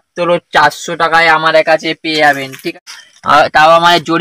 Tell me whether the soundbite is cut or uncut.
cut